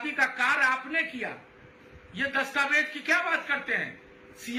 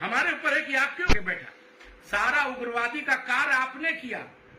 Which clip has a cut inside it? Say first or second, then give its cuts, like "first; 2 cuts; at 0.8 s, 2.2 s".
second; 1 cut; at 1.1 s